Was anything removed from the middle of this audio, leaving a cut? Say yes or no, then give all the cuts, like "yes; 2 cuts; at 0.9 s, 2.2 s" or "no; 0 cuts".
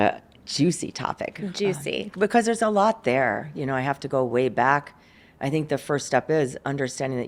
no; 0 cuts